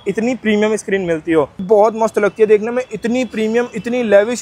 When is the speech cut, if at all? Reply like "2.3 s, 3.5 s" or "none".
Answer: 1.6 s